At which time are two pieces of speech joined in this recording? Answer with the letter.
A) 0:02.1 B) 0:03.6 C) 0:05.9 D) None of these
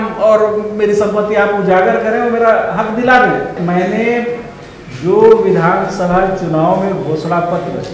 B